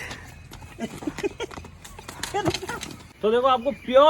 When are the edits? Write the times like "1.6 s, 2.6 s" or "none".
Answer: 3.1 s